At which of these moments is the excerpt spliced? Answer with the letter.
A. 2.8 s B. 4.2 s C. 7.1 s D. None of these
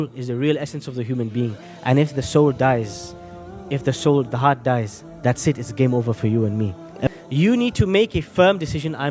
C